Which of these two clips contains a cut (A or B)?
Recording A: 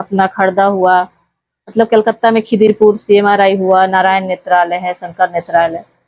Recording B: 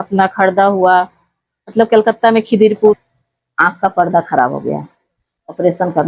B